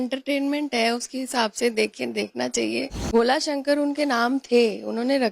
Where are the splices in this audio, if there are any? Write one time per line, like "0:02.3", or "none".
0:03.0